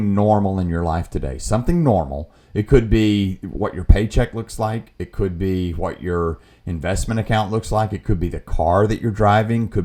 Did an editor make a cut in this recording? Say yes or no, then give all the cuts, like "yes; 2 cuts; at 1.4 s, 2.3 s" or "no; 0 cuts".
no; 0 cuts